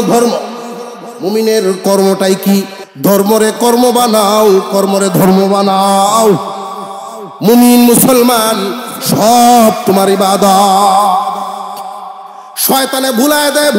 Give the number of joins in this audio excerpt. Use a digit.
1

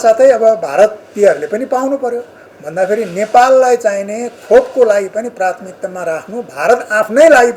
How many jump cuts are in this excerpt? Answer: 0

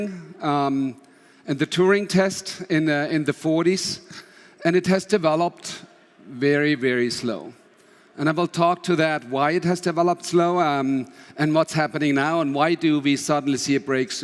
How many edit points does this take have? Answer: 1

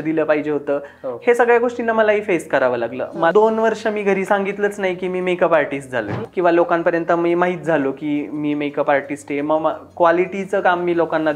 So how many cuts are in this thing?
2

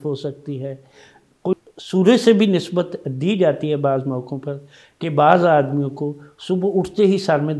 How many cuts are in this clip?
1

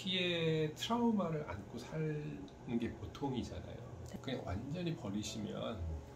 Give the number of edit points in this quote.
1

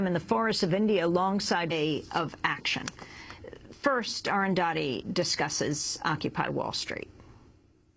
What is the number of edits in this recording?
0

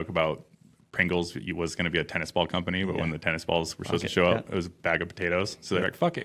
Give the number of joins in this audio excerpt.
0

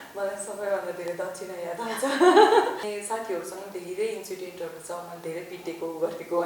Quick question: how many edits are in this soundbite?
1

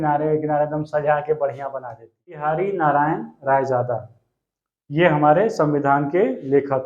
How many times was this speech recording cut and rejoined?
1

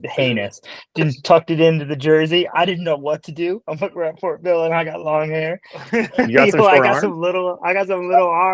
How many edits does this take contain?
1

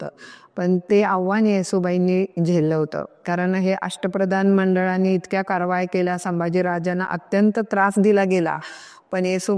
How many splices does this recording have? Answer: 0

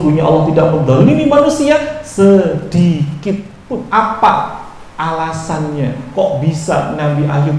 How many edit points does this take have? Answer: 1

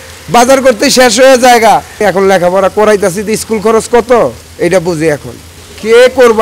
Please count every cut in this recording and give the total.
3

